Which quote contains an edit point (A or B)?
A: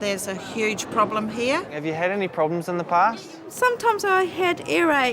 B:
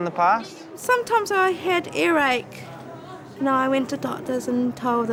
A